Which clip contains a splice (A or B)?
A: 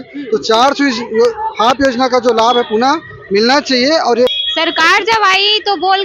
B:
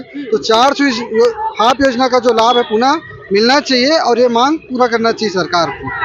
A